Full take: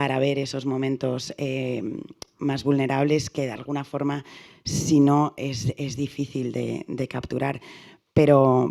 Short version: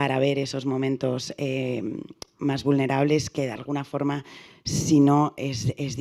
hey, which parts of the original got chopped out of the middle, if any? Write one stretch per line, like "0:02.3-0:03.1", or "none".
none